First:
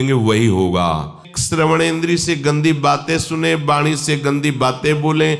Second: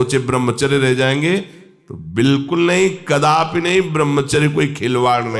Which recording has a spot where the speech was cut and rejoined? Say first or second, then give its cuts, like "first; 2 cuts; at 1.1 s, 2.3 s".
first; 1 cut; at 1.3 s